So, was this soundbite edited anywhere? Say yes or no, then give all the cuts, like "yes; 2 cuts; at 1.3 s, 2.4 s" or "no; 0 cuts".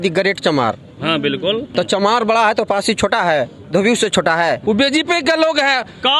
yes; 2 cuts; at 1.7 s, 4.6 s